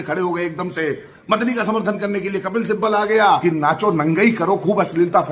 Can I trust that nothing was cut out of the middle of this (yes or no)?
no